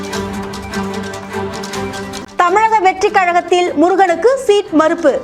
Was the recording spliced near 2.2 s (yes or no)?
yes